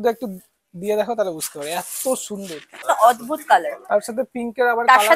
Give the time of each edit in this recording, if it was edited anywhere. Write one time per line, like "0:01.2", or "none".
0:02.8